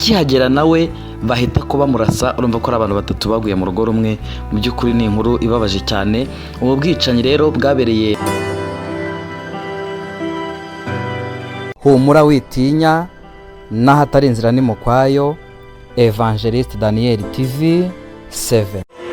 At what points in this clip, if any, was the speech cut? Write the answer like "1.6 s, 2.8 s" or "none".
8.2 s